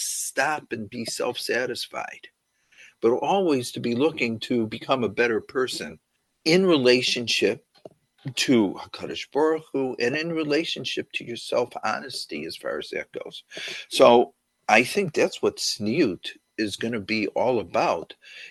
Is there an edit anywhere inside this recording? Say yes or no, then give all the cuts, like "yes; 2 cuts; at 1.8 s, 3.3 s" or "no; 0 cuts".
no; 0 cuts